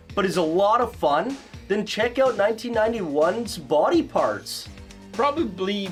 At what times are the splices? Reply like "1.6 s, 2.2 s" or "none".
none